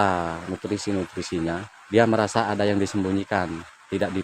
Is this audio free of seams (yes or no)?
no